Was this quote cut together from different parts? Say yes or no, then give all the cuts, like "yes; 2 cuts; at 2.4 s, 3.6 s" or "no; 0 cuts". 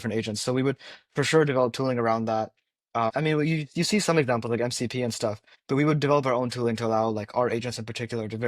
yes; 2 cuts; at 3.1 s, 5.5 s